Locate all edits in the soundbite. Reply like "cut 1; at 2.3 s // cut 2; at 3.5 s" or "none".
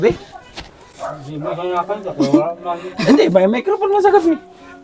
none